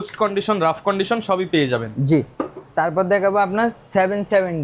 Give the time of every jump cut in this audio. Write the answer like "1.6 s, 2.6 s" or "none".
none